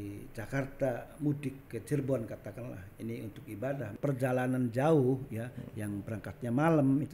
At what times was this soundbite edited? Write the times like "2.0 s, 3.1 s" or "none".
3.9 s

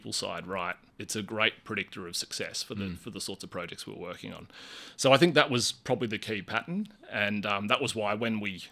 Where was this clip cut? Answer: 0.9 s

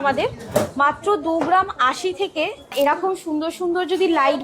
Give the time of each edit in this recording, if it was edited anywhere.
2.7 s

